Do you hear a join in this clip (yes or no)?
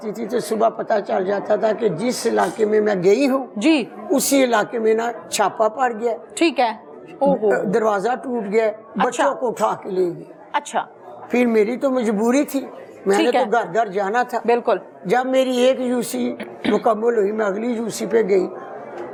no